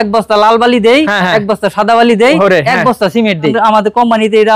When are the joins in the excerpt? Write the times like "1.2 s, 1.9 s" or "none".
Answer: 3.5 s